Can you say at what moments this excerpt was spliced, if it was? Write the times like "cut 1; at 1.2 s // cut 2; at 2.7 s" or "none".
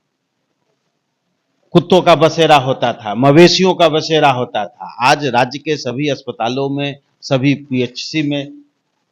none